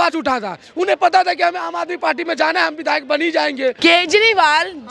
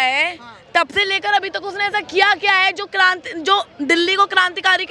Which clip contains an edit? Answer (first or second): first